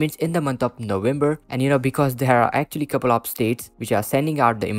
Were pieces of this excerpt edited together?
no; 0 cuts

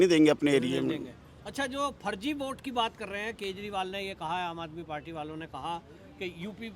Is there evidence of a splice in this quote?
no; 0 cuts

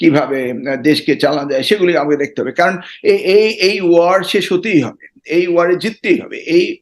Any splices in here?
no; 0 cuts

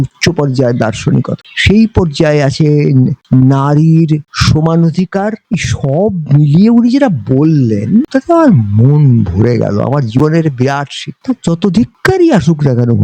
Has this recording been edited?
yes; 2 cuts; at 1.4 s, 5.4 s

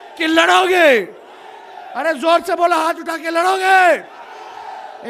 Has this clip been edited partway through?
no; 0 cuts

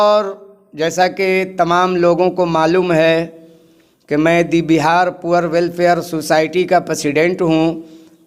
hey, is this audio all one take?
yes; 0 cuts

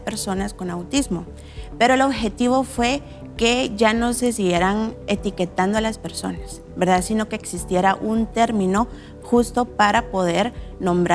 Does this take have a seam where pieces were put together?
no; 0 cuts

